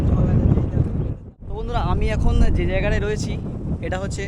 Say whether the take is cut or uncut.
cut